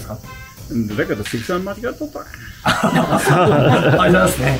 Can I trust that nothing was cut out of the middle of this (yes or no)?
yes